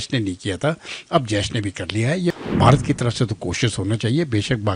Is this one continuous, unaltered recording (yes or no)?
no